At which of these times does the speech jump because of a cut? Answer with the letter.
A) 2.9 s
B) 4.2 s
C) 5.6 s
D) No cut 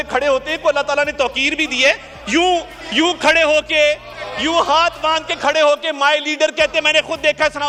D